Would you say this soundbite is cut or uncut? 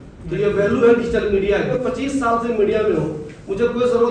cut